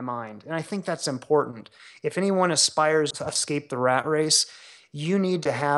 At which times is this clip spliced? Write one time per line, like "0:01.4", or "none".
0:03.1